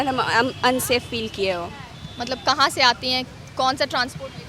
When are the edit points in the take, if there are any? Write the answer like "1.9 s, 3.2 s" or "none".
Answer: none